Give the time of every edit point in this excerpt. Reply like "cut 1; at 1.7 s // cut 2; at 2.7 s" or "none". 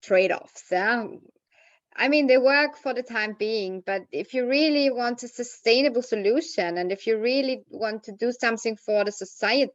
none